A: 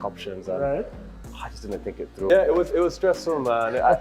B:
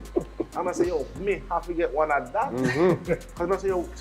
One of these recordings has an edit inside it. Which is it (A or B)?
A